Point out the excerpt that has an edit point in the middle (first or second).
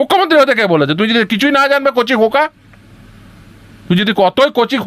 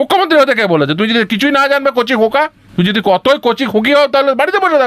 second